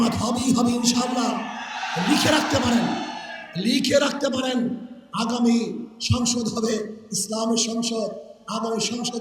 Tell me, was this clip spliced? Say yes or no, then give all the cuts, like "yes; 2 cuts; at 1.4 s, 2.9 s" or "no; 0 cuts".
no; 0 cuts